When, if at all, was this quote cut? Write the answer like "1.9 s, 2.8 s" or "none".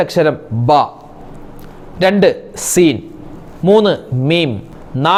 none